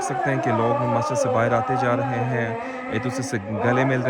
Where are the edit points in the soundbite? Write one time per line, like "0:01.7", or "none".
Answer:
none